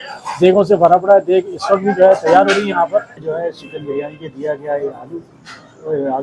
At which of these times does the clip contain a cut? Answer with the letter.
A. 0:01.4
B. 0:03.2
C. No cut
B